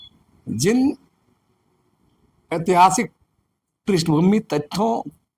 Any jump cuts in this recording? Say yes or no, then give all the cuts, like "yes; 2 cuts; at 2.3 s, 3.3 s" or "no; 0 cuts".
no; 0 cuts